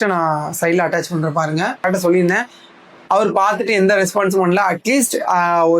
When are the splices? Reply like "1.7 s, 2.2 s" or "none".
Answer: 1.8 s